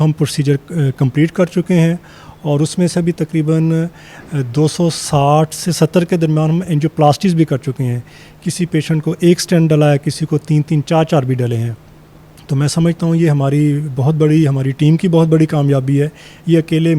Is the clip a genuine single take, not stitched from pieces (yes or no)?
yes